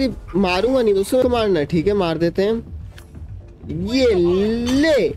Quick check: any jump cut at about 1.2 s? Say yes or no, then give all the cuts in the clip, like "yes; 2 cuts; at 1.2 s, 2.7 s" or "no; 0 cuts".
yes; 1 cut; at 1.2 s